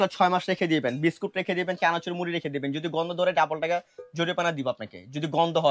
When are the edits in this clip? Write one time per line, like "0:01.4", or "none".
none

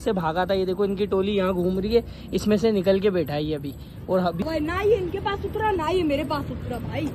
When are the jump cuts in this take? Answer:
0:04.4

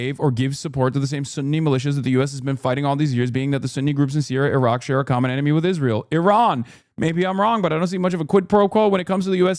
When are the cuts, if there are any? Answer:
none

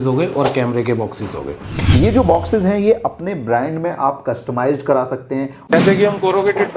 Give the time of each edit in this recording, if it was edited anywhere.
0:01.8
0:05.7

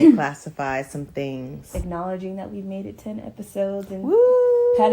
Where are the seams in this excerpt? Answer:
0:01.7

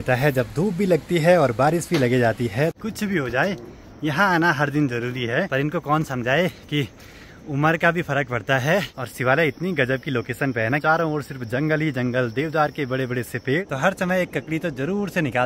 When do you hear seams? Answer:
0:02.8
0:05.5
0:09.1
0:10.8
0:13.7

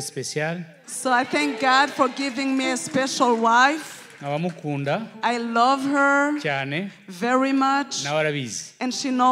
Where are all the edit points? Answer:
none

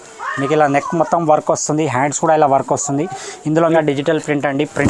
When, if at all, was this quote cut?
0:03.7

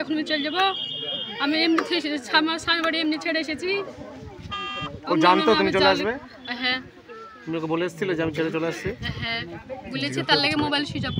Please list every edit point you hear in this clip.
none

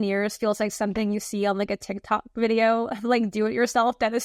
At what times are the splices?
none

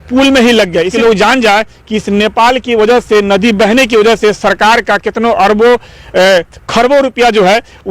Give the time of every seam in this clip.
0:00.9

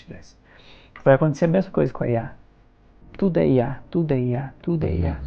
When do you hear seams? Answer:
none

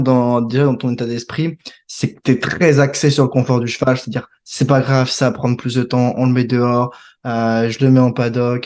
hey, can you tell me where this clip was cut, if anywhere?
none

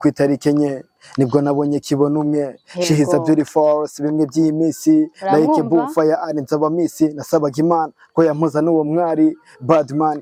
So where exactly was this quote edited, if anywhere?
none

